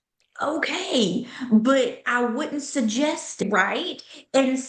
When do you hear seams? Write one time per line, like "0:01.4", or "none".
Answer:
0:03.4

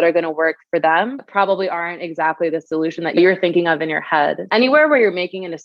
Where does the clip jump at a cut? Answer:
0:03.2
0:04.4

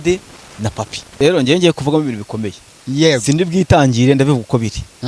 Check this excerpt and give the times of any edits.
0:01.1

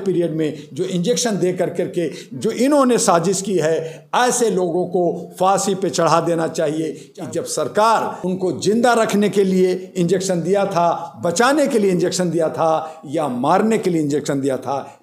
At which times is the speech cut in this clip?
0:07.1
0:08.2

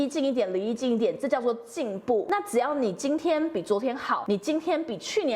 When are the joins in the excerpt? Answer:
0:02.2
0:04.2

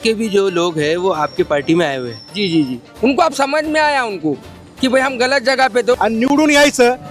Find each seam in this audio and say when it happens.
0:02.8
0:06.0

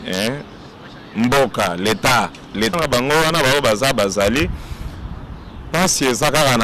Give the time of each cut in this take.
0:02.7

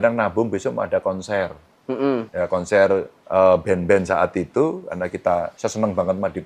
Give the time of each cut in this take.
0:02.3
0:03.2
0:05.5

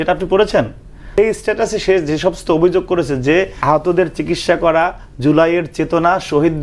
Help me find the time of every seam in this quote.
0:01.2
0:03.5

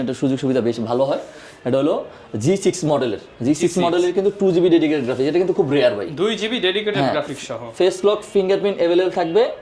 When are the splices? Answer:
none

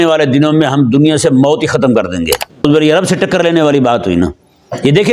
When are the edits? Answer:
0:02.6

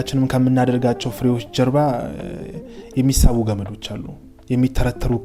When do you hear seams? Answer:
none

